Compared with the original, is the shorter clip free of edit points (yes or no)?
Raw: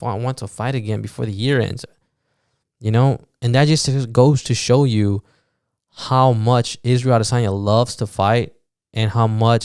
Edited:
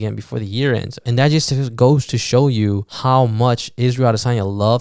no